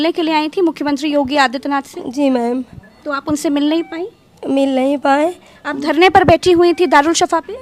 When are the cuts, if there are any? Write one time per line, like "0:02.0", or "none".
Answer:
none